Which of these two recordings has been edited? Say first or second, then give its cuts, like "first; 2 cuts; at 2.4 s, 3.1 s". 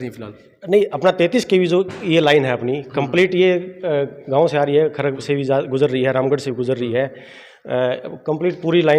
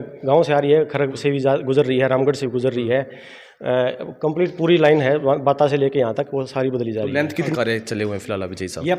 second; 1 cut; at 7.5 s